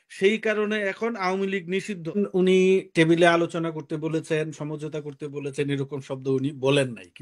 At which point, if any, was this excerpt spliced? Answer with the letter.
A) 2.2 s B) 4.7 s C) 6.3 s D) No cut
A